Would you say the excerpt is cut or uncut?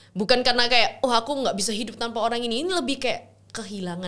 uncut